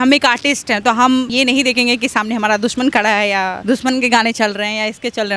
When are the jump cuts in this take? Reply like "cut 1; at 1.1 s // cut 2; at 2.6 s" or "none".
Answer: cut 1; at 1.3 s // cut 2; at 3.5 s